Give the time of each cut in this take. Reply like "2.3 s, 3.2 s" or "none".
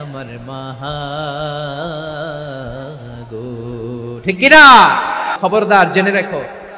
5.3 s